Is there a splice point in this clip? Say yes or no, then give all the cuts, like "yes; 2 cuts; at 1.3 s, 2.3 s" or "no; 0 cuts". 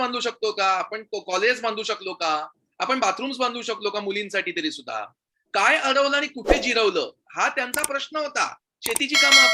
no; 0 cuts